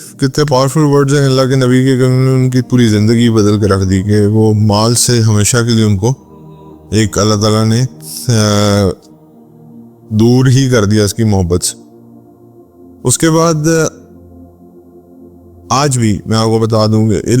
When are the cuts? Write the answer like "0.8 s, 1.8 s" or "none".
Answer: 13.9 s, 15.5 s